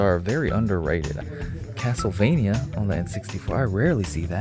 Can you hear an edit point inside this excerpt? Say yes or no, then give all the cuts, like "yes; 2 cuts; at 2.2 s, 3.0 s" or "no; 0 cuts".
yes; 1 cut; at 1.2 s